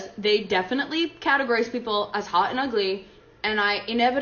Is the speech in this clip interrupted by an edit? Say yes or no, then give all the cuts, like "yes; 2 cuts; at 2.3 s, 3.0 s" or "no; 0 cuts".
no; 0 cuts